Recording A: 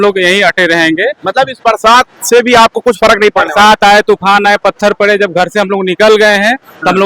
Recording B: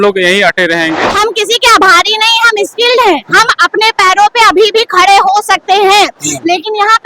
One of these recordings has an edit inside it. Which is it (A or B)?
B